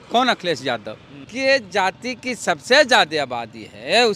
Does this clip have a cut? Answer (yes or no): yes